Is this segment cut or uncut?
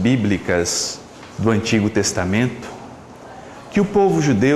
uncut